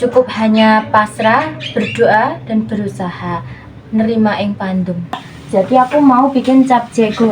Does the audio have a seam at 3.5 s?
no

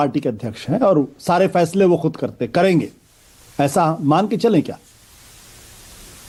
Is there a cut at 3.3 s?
no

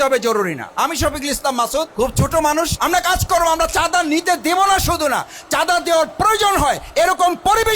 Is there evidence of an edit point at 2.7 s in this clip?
yes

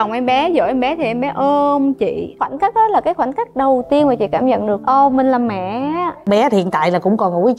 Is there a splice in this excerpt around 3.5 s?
no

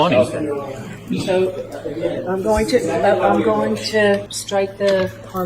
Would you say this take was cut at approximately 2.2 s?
no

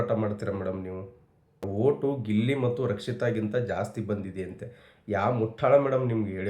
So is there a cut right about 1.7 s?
yes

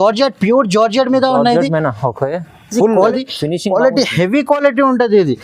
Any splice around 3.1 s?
yes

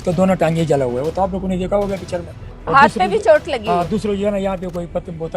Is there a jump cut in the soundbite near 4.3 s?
no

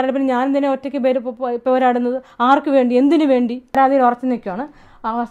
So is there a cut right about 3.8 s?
yes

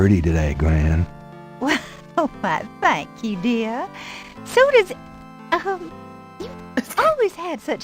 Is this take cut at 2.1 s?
no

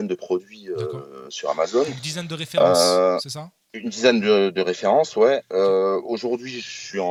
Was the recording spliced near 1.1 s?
no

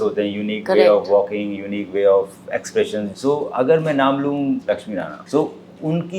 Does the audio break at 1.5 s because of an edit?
no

